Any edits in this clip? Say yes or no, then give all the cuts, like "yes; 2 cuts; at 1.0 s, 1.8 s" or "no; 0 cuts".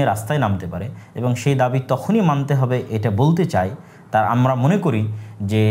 no; 0 cuts